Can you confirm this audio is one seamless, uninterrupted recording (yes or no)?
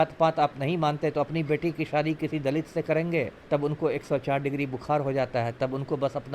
no